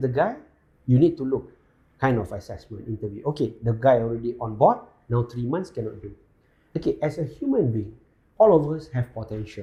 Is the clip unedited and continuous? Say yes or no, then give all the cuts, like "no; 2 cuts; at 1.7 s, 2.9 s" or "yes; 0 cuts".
yes; 0 cuts